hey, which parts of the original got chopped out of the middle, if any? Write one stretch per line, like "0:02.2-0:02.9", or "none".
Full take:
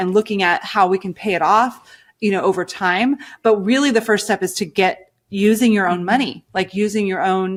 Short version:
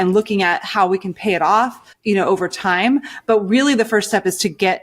0:01.9-0:02.0